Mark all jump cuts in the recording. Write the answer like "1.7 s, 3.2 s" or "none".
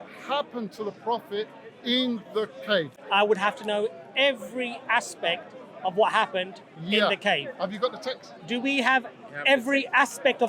3.0 s